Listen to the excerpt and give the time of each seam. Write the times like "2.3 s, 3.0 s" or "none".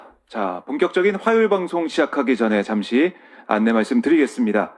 none